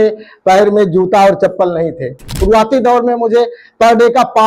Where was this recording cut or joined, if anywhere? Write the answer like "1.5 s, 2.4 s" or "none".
2.4 s